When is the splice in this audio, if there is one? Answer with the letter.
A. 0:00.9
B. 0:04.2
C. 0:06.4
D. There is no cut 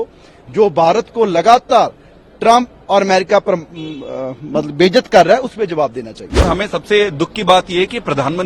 C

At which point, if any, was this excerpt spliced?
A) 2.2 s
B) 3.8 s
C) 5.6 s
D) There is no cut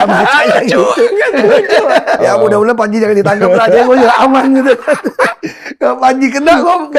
A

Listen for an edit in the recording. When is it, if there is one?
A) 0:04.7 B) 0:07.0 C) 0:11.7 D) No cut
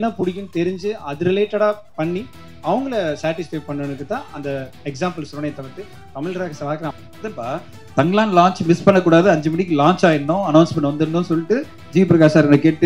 B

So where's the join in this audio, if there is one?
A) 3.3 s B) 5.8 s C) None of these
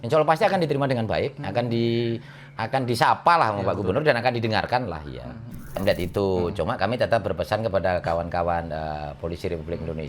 B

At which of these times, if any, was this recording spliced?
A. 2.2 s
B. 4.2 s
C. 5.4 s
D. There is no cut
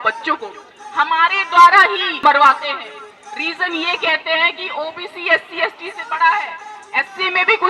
A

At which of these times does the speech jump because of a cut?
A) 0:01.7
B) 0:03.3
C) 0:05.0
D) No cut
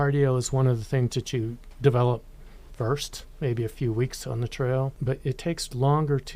C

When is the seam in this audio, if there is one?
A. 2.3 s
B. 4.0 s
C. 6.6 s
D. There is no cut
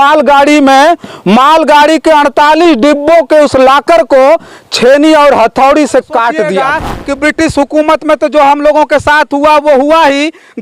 C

